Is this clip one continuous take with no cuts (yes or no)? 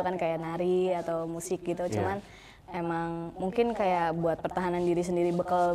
yes